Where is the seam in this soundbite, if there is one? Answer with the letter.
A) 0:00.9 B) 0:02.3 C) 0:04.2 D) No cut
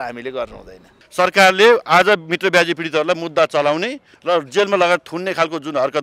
A